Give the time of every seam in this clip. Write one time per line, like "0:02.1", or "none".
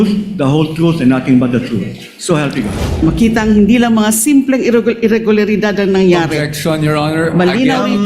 0:03.0